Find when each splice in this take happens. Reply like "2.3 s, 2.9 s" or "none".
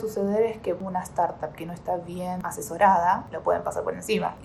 0.8 s, 2.4 s